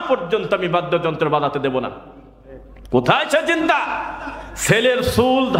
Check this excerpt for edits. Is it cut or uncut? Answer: uncut